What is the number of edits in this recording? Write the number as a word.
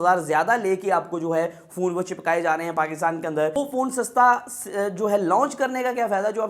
one